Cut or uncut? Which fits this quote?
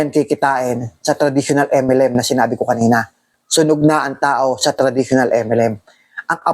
cut